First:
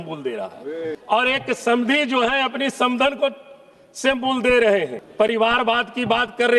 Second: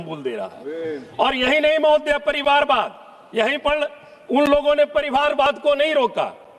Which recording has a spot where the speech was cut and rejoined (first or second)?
first